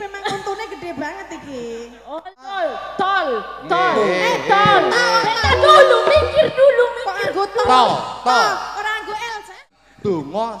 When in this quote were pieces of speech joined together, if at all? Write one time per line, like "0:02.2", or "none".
0:02.0
0:09.7